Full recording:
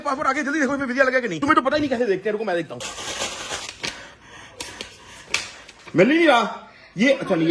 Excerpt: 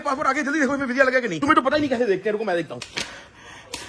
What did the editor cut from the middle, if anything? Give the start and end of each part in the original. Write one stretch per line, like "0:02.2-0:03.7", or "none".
0:02.8-0:03.7